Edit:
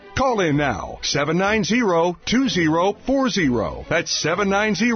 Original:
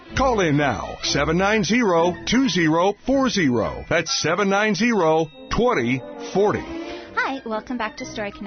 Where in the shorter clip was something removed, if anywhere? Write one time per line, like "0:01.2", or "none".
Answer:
none

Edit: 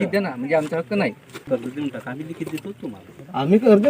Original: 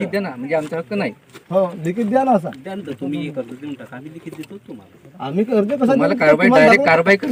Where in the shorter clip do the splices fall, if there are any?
0:01.4

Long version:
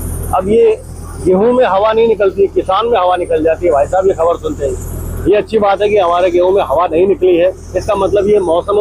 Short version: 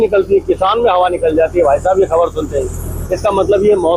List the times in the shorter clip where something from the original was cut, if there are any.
0:03.0

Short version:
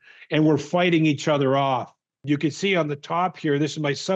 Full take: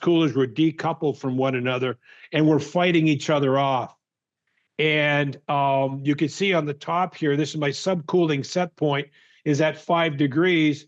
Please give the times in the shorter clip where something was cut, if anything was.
0:02.2

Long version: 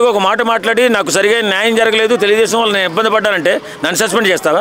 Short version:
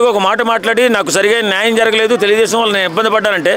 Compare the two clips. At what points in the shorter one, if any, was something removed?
none

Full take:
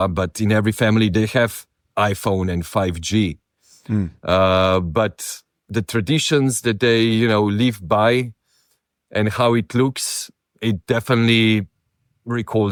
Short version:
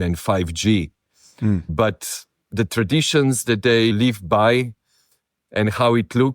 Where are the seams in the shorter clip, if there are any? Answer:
0:01.7
0:03.9

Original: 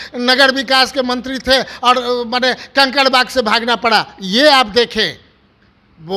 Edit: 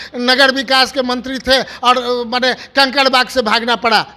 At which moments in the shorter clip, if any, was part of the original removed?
none

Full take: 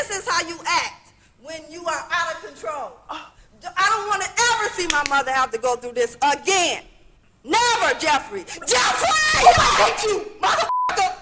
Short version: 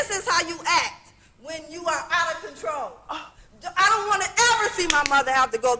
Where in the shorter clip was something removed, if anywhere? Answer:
none

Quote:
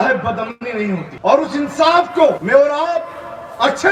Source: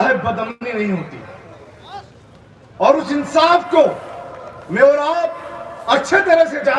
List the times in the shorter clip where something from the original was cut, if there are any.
0:01.1
0:02.4

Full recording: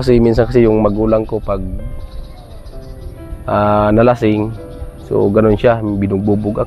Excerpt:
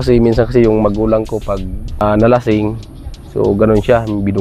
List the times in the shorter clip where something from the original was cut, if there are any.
0:02.0

